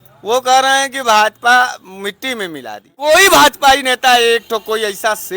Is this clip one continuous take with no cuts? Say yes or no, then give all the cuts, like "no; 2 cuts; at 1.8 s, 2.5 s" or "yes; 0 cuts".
no; 1 cut; at 3.0 s